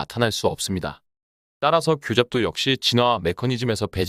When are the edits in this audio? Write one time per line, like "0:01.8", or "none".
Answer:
none